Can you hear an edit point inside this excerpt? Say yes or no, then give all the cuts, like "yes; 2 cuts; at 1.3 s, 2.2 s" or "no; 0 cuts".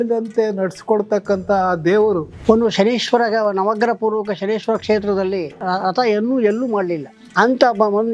yes; 1 cut; at 2.3 s